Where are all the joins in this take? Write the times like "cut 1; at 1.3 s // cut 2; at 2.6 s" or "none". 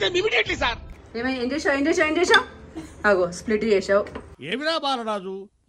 cut 1; at 0.9 s